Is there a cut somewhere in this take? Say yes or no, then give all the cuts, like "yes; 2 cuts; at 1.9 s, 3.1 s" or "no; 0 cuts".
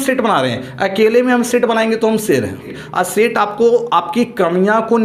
yes; 1 cut; at 2.8 s